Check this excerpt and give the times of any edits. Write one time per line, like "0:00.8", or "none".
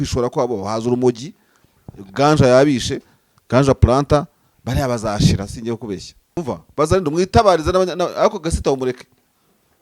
0:06.2